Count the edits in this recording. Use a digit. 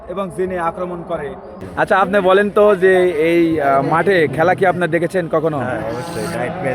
1